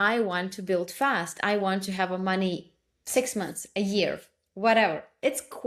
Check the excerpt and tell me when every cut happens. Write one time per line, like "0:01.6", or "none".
none